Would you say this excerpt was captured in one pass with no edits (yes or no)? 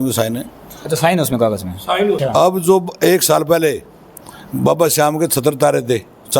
no